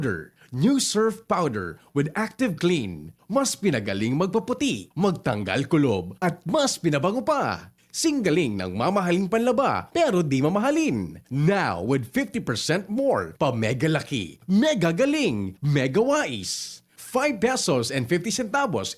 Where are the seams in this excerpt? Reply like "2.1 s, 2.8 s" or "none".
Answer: none